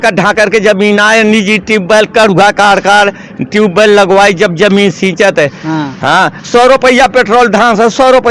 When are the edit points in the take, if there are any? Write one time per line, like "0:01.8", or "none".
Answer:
none